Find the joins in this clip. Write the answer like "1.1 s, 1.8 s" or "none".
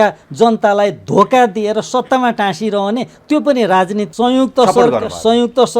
4.1 s